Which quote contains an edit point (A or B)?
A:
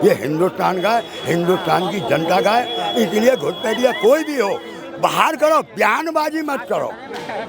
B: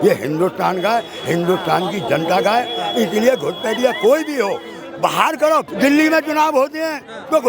B